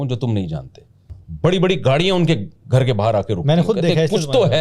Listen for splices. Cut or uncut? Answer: cut